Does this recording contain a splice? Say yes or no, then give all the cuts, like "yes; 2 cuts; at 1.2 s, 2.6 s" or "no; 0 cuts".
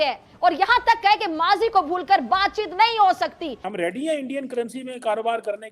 yes; 1 cut; at 3.6 s